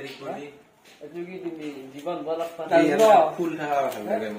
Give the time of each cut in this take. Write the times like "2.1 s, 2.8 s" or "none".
2.6 s